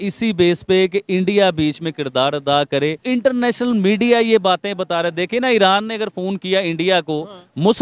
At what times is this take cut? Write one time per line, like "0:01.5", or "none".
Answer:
0:03.0